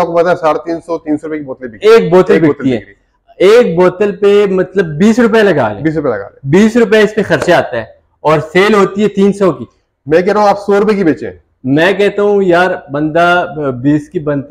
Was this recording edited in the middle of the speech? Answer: no; 0 cuts

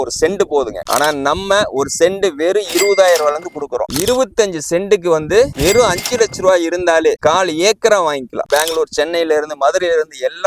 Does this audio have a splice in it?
yes; 3 cuts; at 3.9 s, 7.2 s, 8.4 s

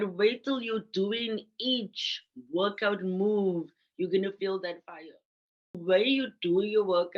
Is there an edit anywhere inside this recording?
yes; 1 cut; at 5.8 s

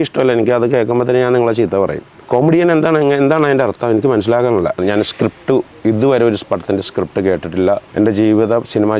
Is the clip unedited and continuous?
no; 3 cuts; at 2.1 s, 4.8 s, 7.9 s

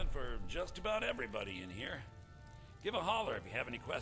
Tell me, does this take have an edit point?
no; 0 cuts

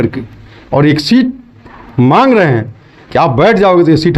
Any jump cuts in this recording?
no; 0 cuts

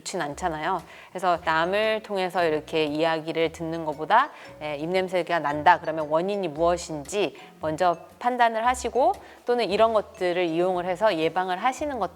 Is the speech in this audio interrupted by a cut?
no; 0 cuts

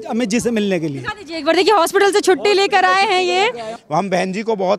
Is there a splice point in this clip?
yes; 1 cut; at 3.8 s

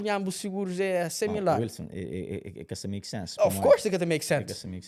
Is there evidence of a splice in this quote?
no; 0 cuts

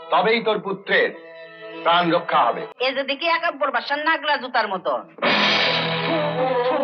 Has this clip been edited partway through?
yes; 1 cut; at 2.7 s

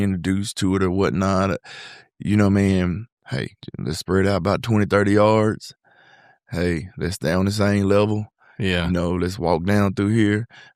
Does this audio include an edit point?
no; 0 cuts

